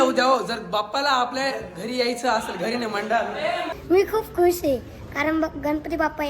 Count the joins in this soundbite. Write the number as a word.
one